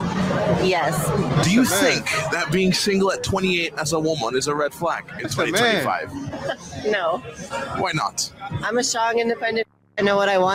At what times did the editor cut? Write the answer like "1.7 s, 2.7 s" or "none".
none